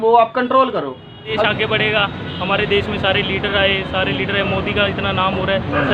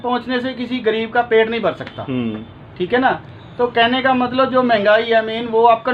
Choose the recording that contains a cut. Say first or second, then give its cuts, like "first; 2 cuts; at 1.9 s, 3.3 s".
first; 1 cut; at 1.4 s